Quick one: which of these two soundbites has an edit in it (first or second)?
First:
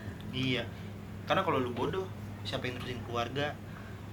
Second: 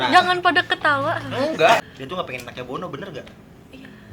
second